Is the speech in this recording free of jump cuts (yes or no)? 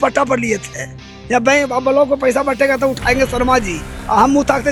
yes